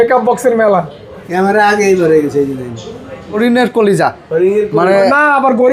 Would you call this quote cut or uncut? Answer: cut